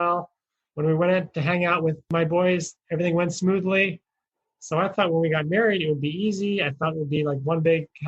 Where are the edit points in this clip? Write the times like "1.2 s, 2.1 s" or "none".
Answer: 2.1 s